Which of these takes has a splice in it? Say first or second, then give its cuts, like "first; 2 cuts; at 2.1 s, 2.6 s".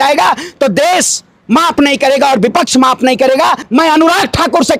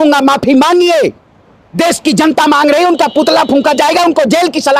first; 1 cut; at 3.6 s